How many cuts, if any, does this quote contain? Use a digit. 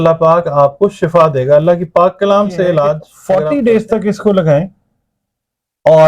1